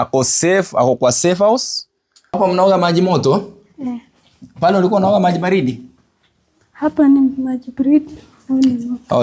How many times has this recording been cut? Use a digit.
1